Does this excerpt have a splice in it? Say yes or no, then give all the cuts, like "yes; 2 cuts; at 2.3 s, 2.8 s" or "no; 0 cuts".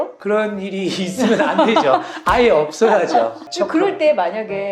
yes; 1 cut; at 3.4 s